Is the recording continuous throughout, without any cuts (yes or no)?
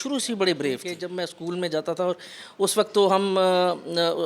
no